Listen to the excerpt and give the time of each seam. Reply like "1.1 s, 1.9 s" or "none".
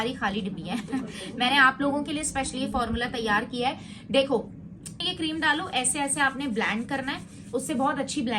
5.0 s